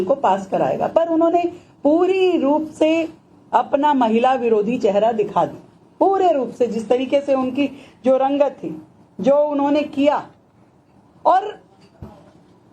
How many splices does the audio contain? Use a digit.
0